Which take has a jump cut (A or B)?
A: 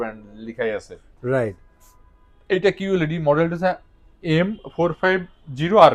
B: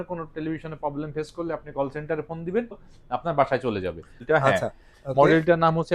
B